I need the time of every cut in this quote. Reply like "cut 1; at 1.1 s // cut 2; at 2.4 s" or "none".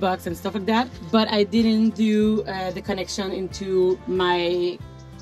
cut 1; at 1.0 s // cut 2; at 4.0 s